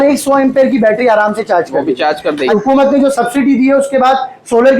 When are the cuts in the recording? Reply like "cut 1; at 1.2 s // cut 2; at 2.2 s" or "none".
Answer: cut 1; at 2.5 s // cut 2; at 3.1 s

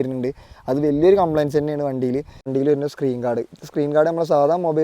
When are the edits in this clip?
cut 1; at 2.5 s

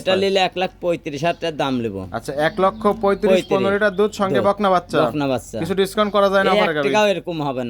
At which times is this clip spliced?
none

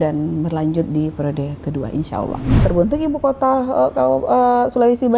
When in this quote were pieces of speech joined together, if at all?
cut 1; at 2.5 s

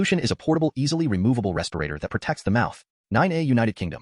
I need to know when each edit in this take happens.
cut 1; at 2.9 s

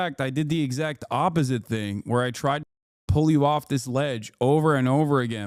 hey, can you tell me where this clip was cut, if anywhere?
none

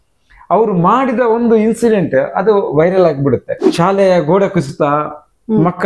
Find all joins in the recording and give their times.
cut 1; at 3.6 s

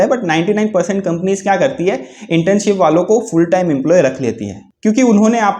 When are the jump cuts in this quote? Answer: none

